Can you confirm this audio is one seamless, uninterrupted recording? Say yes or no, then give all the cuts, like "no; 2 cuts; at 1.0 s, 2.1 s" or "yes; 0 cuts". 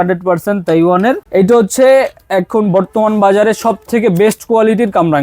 no; 1 cut; at 1.2 s